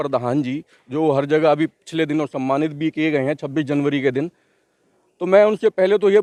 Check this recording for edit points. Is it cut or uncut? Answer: uncut